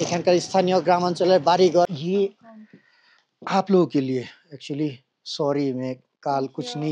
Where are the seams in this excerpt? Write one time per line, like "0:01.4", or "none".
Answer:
0:01.9